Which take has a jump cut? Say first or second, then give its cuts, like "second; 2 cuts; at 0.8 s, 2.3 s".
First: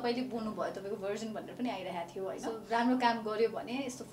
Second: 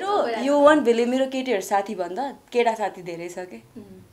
first; 1 cut; at 2.6 s